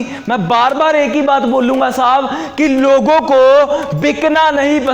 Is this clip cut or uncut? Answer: uncut